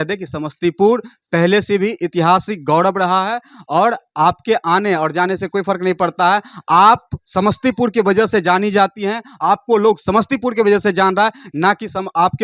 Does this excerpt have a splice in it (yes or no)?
no